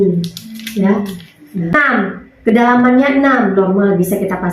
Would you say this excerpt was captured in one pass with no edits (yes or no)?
no